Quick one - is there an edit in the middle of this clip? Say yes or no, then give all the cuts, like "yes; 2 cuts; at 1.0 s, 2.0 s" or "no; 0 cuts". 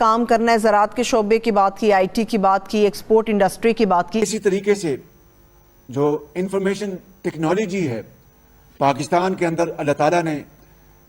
yes; 1 cut; at 4.2 s